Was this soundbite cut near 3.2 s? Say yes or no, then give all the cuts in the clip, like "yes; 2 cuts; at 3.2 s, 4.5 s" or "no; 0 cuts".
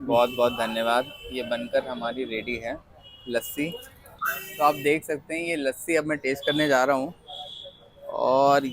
no; 1 cut; at 4.4 s